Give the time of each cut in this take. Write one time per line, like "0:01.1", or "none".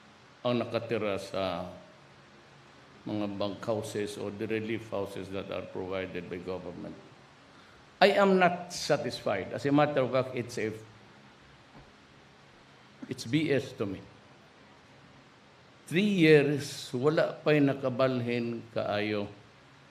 none